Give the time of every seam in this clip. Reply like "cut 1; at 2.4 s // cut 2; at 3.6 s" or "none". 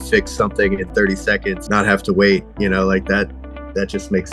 cut 1; at 1.6 s